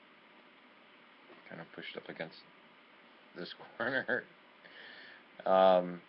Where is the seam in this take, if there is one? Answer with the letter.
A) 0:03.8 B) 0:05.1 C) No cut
A